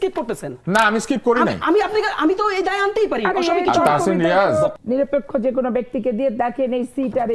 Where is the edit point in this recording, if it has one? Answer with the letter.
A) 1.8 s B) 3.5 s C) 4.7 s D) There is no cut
C